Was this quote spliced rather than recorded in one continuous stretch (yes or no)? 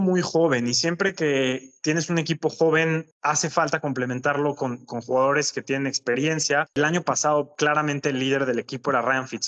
no